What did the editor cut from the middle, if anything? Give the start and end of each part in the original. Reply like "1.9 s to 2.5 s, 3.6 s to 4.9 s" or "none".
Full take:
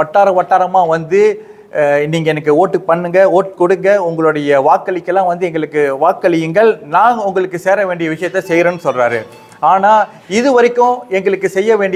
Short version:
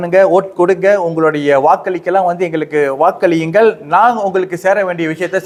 none